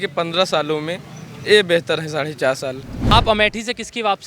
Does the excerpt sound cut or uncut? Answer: cut